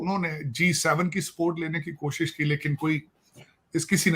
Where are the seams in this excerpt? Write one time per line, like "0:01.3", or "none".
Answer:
none